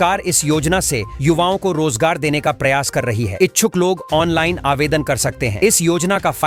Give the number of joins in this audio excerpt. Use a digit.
0